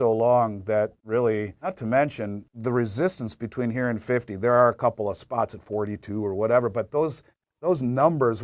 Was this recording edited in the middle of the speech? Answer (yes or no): yes